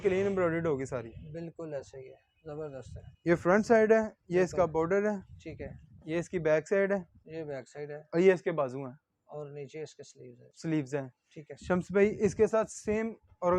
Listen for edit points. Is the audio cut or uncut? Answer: uncut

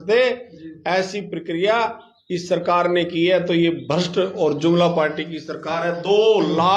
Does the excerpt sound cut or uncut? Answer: uncut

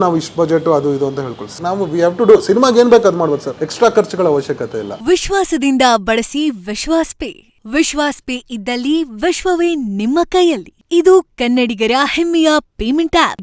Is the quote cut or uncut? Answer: cut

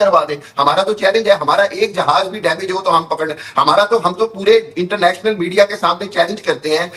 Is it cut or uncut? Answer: cut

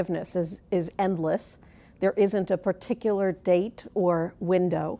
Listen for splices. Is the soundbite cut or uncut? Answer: cut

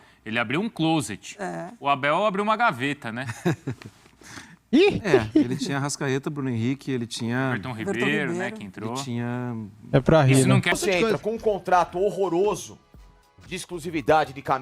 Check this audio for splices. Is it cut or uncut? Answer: cut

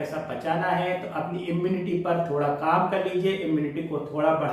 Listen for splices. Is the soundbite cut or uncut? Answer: uncut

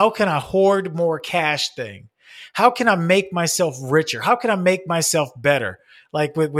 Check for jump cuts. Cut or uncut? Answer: uncut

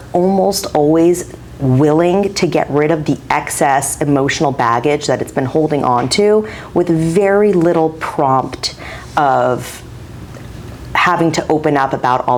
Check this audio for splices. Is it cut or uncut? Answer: uncut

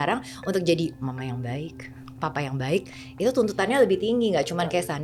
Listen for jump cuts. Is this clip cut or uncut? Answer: uncut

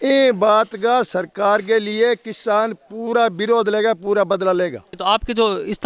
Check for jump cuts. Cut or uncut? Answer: cut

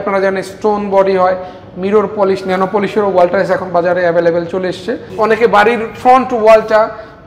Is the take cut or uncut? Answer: cut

